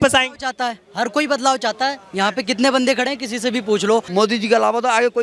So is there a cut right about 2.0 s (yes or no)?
no